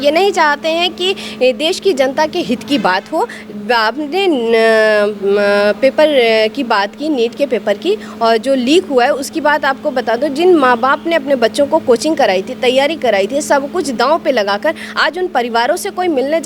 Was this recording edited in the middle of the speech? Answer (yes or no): no